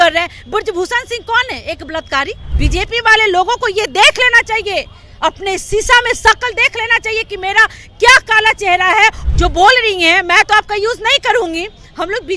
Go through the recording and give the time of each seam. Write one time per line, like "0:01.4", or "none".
0:02.4
0:09.2